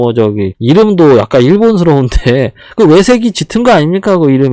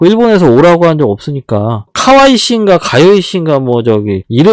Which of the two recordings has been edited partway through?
second; 1 cut; at 1.8 s

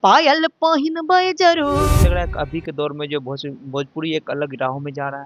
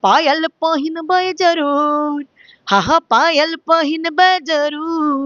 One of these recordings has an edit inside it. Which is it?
first; 1 cut; at 1.9 s

